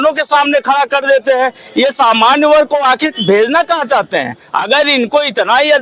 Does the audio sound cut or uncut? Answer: uncut